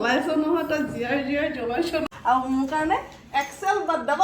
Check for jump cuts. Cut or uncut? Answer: cut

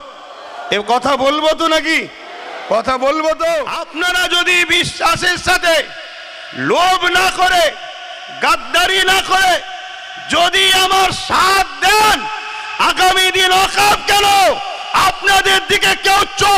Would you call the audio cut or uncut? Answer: cut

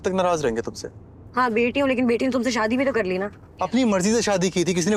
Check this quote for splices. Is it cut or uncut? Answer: uncut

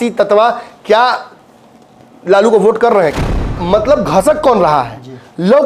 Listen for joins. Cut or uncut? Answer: cut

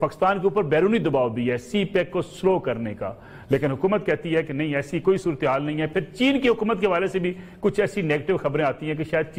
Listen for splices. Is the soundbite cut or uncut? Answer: uncut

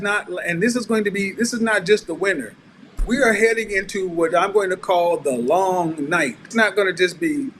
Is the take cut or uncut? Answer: cut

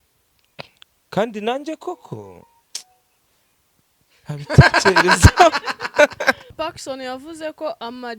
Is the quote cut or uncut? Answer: cut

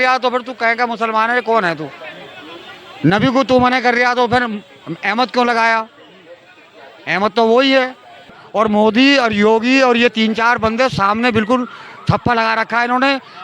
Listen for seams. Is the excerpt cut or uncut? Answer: cut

